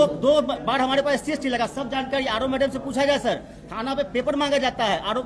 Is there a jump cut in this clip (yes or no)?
no